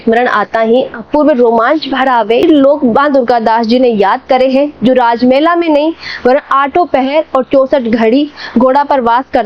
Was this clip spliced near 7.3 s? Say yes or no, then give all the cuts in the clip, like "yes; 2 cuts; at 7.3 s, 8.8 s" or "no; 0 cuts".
no; 1 cut; at 2.4 s